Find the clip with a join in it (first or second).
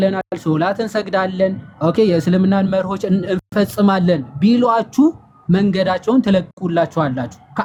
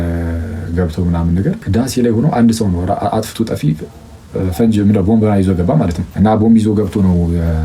second